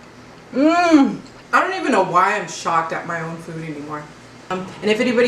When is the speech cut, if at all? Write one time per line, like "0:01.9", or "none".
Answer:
0:01.3
0:04.5